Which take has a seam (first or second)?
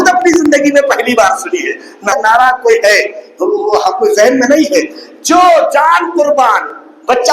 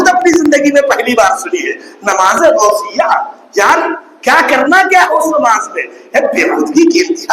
first